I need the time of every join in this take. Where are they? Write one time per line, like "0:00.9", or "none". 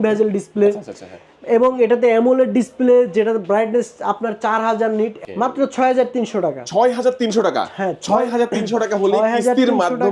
0:05.2